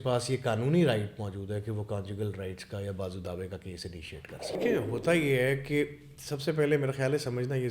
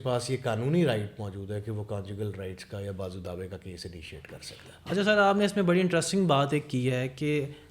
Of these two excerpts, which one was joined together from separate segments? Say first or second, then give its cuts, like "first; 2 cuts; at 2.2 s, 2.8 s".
first; 1 cut; at 4.6 s